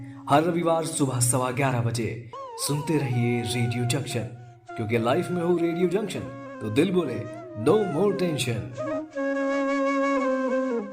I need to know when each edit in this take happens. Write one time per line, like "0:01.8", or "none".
0:02.4